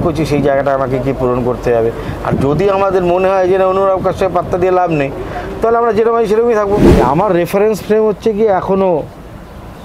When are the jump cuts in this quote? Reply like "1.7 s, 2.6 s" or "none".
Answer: 6.9 s